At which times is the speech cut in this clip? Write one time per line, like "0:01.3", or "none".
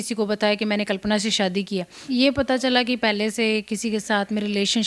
0:02.0